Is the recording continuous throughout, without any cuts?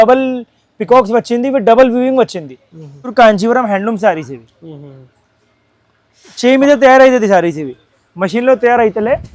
no; 1 cut; at 3.1 s

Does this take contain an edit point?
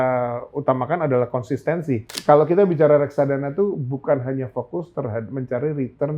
yes; 1 cut; at 2.1 s

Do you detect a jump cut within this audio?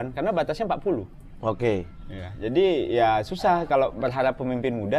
no; 0 cuts

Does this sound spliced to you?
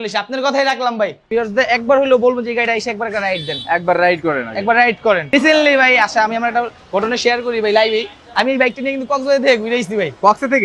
yes; 2 cuts; at 1.2 s, 5.3 s

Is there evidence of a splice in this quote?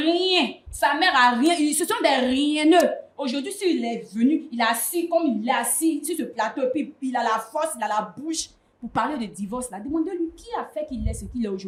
no; 0 cuts

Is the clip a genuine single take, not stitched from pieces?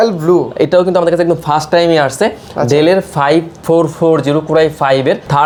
yes; 0 cuts

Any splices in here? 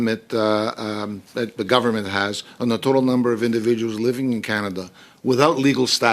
no; 0 cuts

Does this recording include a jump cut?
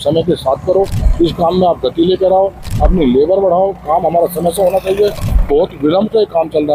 no; 0 cuts

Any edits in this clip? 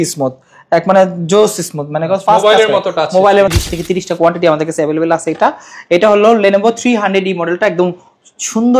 yes; 1 cut; at 3.5 s

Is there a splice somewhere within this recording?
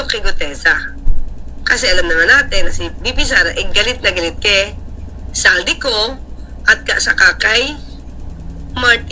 no; 0 cuts

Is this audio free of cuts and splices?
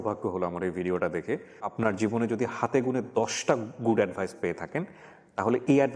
no; 1 cut; at 1.7 s

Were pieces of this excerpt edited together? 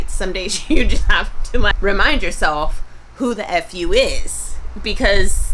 yes; 1 cut; at 1.7 s

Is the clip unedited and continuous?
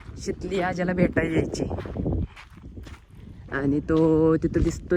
yes; 0 cuts

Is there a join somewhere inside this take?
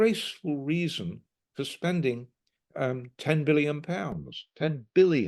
no; 0 cuts

